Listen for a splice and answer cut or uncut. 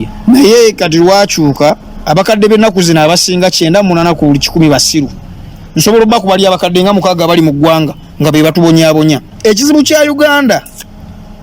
cut